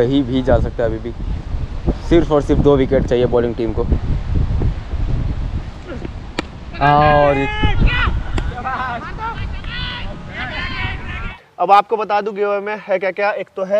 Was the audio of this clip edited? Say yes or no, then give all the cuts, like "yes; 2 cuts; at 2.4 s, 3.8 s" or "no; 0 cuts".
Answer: yes; 2 cuts; at 7.9 s, 11.3 s